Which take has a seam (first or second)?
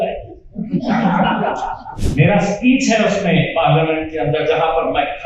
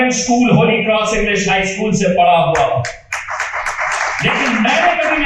first